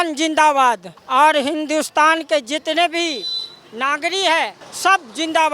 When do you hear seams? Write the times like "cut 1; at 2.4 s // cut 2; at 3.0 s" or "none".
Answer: cut 1; at 0.9 s // cut 2; at 4.6 s